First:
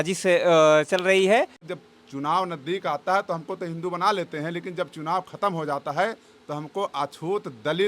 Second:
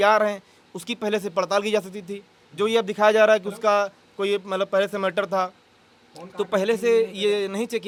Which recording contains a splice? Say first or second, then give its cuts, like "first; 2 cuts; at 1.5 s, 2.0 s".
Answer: first; 1 cut; at 1.7 s